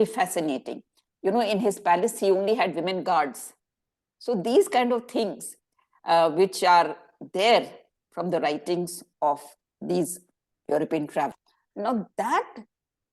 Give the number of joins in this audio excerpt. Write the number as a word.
one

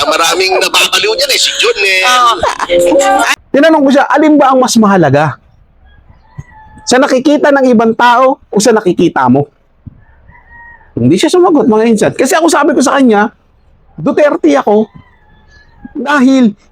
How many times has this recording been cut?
one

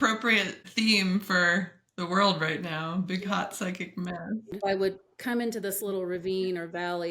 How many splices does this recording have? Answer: one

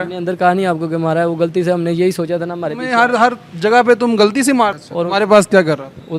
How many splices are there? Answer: one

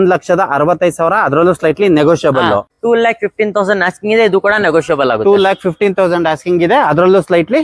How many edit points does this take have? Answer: one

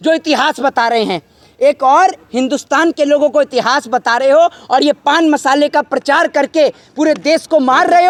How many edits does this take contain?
zero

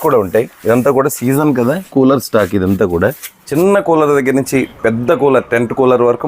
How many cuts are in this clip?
one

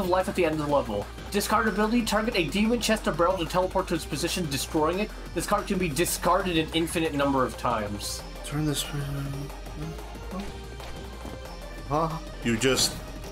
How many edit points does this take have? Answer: one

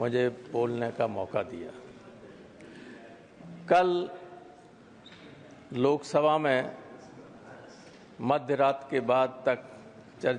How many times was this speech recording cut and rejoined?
zero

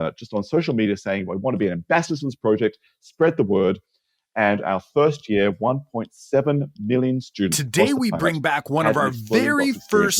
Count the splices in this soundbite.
zero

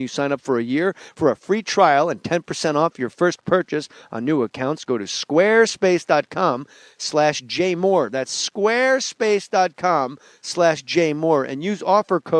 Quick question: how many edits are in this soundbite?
one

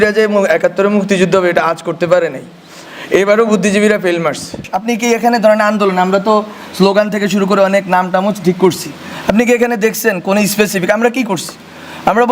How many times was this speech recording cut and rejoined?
one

